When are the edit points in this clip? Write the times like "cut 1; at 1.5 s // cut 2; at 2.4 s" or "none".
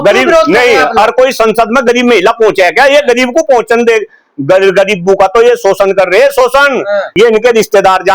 cut 1; at 7.1 s